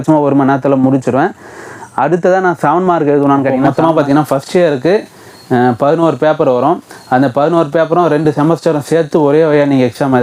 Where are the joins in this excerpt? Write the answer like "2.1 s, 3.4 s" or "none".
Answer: 3.7 s